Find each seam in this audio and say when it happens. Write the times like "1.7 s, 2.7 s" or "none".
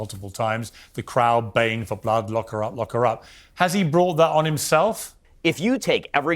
5.2 s

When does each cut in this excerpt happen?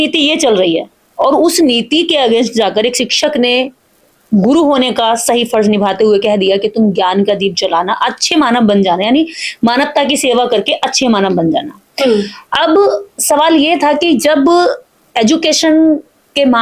none

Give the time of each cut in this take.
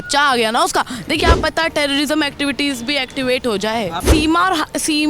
1.2 s, 4.0 s

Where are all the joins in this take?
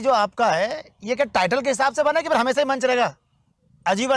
none

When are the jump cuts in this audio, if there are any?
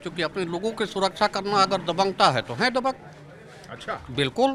none

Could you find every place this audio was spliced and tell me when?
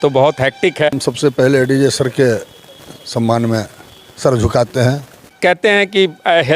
0.9 s, 5.3 s

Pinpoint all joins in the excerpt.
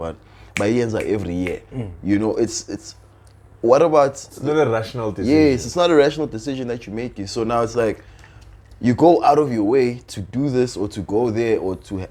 none

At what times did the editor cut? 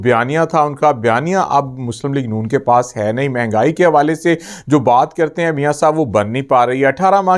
none

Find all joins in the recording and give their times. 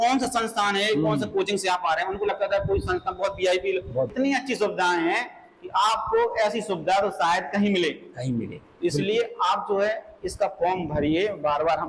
4.1 s

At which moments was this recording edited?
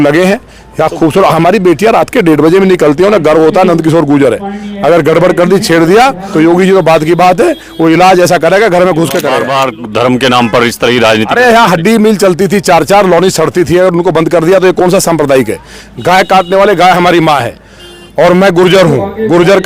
9.5 s

